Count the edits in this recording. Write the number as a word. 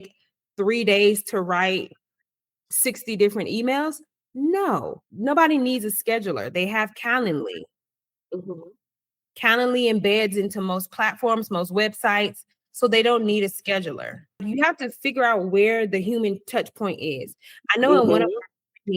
two